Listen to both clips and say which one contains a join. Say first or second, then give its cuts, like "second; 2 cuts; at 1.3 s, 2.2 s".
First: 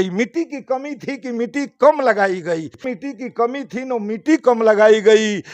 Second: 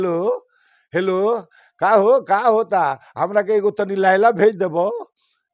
first; 1 cut; at 2.9 s